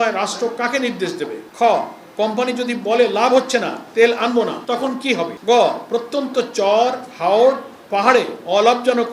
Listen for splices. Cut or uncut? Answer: cut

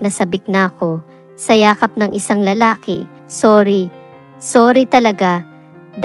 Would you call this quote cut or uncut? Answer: cut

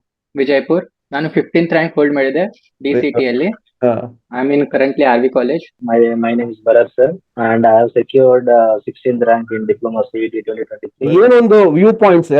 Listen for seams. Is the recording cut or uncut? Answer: cut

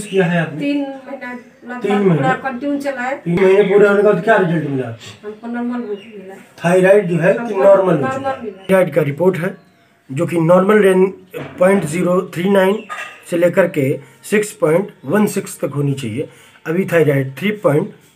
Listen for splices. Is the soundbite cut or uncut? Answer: cut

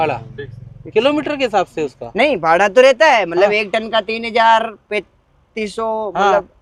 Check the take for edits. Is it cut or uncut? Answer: uncut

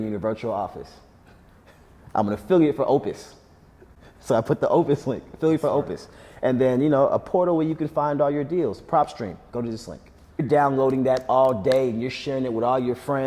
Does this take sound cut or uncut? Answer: cut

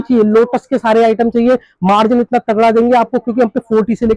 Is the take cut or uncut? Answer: uncut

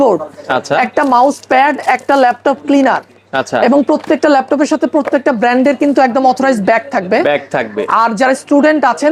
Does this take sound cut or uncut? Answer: uncut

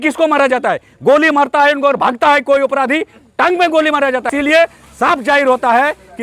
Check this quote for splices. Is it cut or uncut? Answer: cut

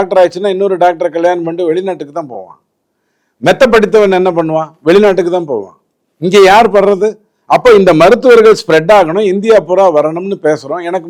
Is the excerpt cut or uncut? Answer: uncut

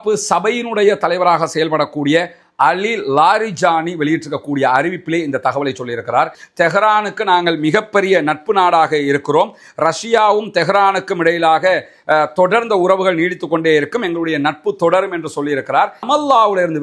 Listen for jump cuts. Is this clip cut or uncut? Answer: cut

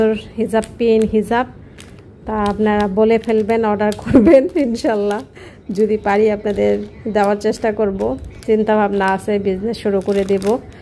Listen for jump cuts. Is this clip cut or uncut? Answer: uncut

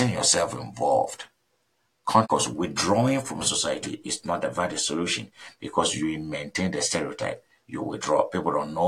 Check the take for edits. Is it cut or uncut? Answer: cut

